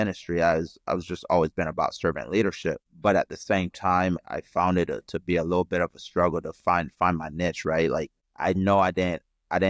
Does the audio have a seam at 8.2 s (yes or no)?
yes